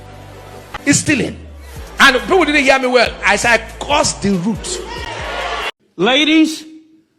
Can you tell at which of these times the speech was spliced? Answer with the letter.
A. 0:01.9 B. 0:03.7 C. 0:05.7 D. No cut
C